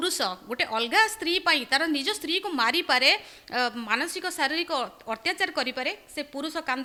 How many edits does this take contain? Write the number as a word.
zero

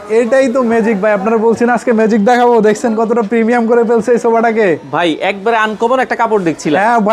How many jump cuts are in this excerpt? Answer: zero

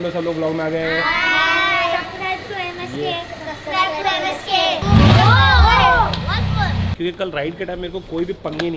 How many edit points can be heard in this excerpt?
two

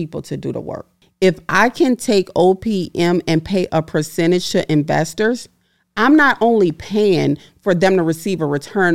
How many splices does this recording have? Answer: one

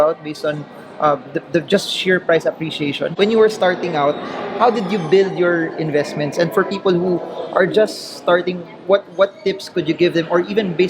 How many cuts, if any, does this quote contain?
one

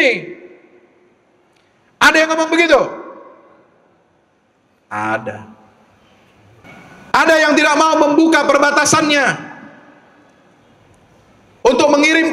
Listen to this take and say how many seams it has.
one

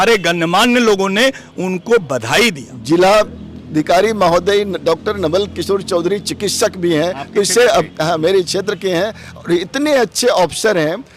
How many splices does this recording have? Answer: one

